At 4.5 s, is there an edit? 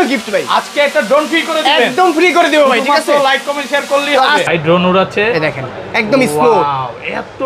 yes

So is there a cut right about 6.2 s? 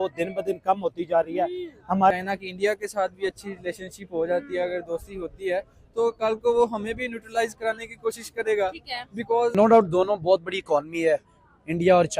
no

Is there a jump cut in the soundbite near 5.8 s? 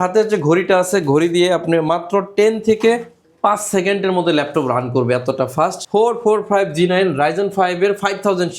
yes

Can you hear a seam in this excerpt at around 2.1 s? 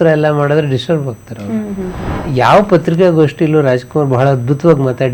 yes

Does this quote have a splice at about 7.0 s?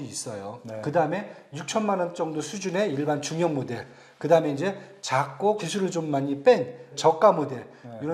yes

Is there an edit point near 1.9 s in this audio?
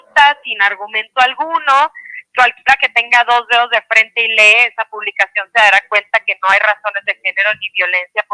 no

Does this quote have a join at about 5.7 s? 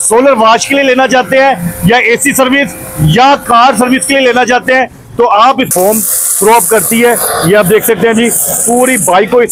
yes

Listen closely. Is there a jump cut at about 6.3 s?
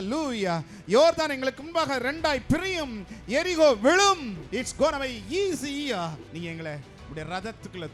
yes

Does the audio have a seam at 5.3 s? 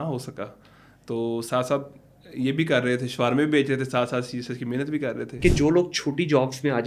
yes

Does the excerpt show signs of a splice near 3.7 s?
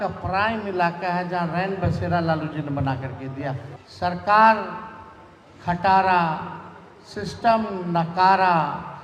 yes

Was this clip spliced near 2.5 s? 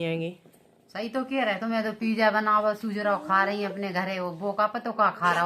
no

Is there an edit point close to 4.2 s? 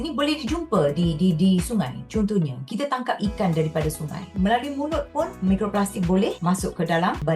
yes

